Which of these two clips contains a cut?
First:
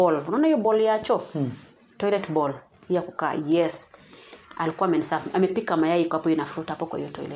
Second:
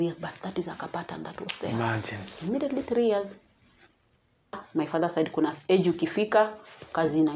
second; 1 cut; at 4.6 s

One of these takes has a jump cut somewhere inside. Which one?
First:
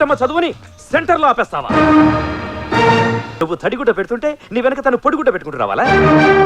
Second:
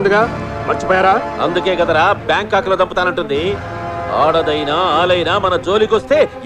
first; 1 cut; at 3.3 s

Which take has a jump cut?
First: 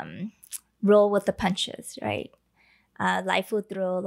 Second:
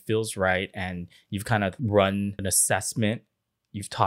second; 2 cuts; at 1.8 s, 2.4 s

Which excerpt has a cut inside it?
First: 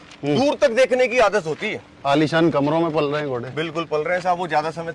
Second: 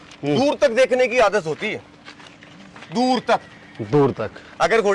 first; 1 cut; at 1.9 s

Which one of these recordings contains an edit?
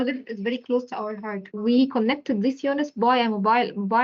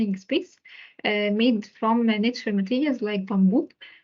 first; 1 cut; at 1.4 s

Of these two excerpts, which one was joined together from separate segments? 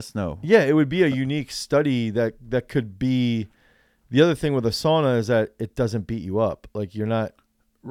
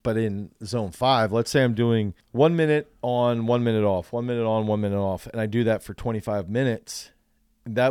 second; 1 cut; at 2.2 s

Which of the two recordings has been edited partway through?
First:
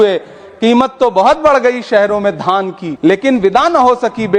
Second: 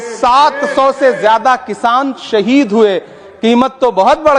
first; 1 cut; at 2.8 s

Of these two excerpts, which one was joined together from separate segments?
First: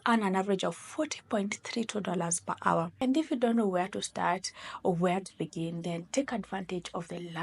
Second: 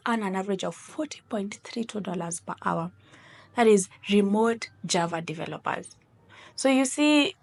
first; 1 cut; at 2.9 s

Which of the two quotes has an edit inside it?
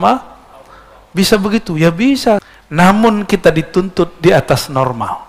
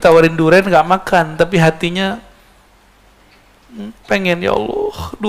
first; 1 cut; at 2.2 s

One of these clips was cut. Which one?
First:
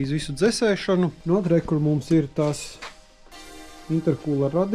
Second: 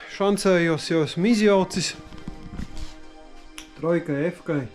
first; 1 cut; at 1.2 s

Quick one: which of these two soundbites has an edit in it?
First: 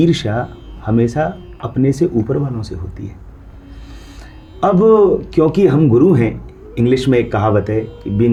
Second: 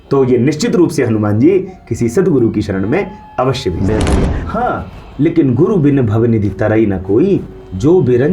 second; 1 cut; at 4.4 s

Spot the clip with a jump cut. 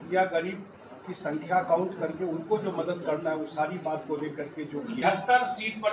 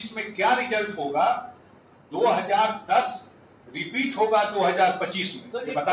first; 1 cut; at 5.0 s

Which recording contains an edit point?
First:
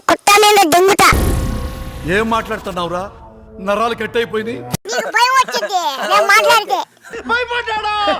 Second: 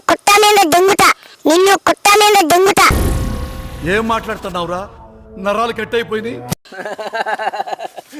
first; 2 cuts; at 0.9 s, 4.8 s

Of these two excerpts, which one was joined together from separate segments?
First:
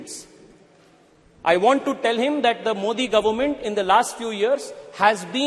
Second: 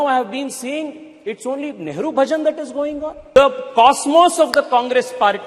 second; 1 cut; at 3.4 s

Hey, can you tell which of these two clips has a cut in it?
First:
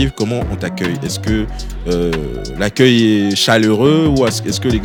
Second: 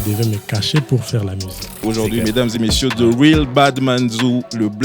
second; 1 cut; at 1.8 s

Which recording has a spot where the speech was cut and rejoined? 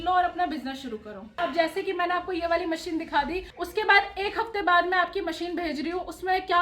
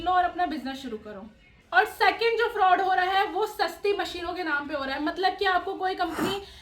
first; 2 cuts; at 1.4 s, 3.5 s

